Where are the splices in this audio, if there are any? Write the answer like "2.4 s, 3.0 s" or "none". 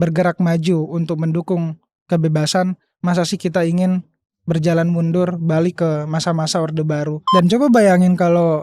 7.2 s